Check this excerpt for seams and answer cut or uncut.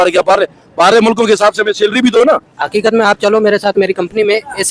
cut